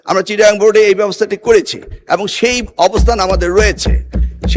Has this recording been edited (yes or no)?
no